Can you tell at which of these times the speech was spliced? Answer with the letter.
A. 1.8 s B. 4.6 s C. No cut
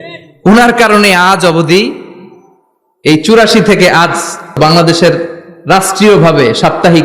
B